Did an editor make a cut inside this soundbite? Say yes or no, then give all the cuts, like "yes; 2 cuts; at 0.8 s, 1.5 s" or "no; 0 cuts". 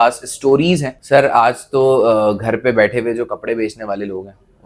yes; 1 cut; at 0.9 s